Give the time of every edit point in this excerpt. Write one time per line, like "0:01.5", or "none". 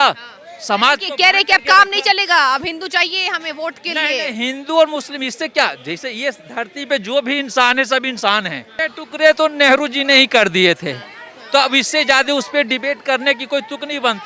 0:08.7